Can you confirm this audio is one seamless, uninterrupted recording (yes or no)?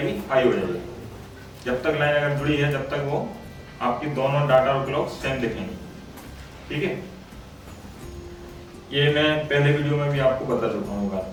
yes